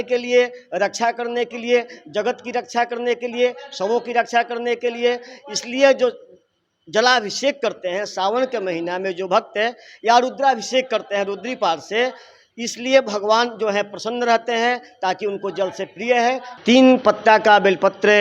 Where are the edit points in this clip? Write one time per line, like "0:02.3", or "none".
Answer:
none